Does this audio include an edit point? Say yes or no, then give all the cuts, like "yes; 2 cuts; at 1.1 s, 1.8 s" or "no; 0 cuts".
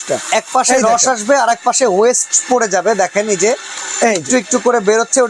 no; 0 cuts